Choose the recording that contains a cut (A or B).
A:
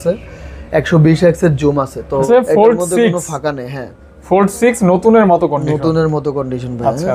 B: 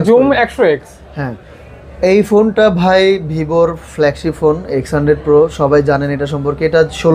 A